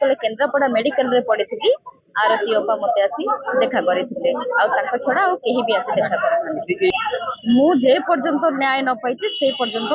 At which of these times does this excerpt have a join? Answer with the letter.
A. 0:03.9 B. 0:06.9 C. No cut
B